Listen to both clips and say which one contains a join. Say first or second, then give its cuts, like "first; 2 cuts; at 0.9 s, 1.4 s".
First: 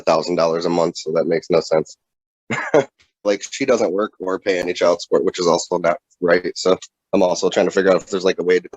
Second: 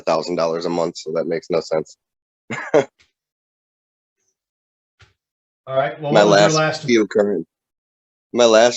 first; 2 cuts; at 3.3 s, 6.9 s